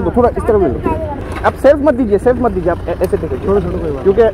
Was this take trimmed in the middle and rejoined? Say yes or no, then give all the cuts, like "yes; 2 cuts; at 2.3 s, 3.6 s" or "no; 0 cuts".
yes; 1 cut; at 1.2 s